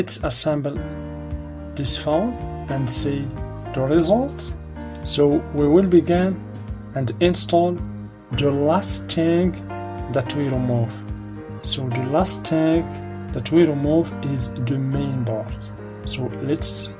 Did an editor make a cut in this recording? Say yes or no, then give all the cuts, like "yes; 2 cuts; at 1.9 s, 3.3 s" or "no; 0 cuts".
yes; 1 cut; at 3.4 s